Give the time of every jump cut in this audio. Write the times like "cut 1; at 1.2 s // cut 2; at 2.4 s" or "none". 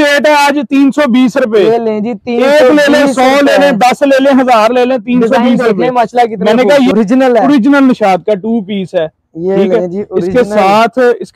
cut 1; at 6.9 s

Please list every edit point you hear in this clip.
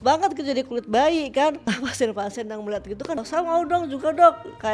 cut 1; at 1.7 s // cut 2; at 3.2 s

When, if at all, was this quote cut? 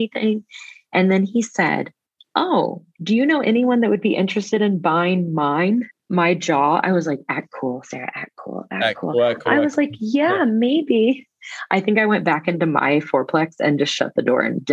cut 1; at 6.0 s

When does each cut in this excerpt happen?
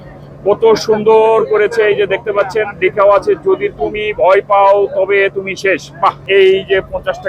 cut 1; at 6.3 s

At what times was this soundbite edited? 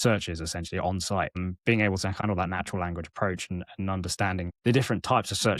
cut 1; at 1.4 s // cut 2; at 2.2 s // cut 3; at 4.5 s

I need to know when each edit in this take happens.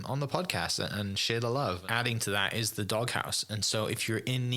cut 1; at 1.8 s

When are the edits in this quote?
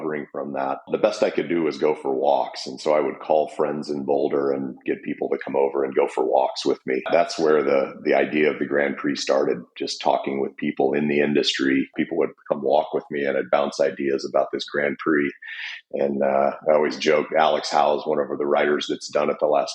cut 1; at 0.9 s // cut 2; at 7.1 s // cut 3; at 11.9 s

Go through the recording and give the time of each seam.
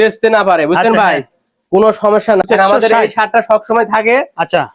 cut 1; at 2.4 s

